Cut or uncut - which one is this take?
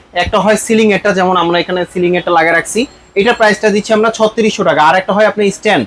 uncut